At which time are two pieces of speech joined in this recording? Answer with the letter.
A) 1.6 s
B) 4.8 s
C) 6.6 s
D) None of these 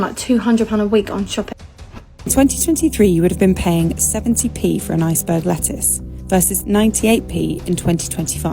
A